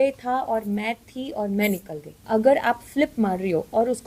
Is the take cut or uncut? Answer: cut